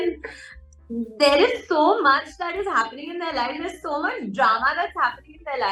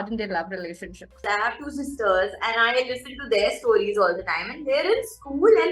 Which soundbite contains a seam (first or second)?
second